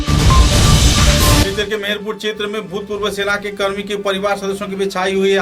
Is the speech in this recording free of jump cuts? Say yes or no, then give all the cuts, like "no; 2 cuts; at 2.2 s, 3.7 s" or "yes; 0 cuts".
no; 1 cut; at 1.4 s